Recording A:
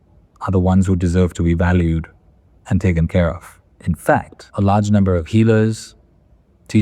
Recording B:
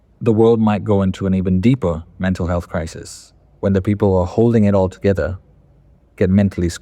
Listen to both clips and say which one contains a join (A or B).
A